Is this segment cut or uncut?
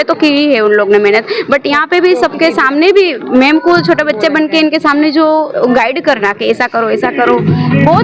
uncut